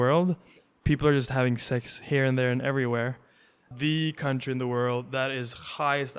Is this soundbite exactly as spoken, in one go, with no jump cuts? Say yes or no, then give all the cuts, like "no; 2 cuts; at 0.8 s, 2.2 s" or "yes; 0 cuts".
no; 1 cut; at 3.7 s